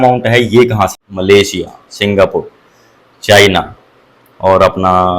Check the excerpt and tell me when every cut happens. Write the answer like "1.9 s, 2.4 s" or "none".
1.0 s